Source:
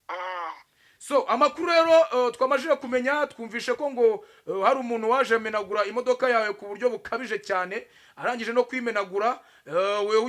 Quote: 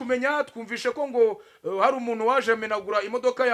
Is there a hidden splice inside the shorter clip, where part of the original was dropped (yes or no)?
no